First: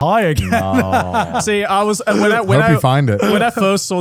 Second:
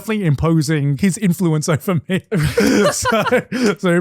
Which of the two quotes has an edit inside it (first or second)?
second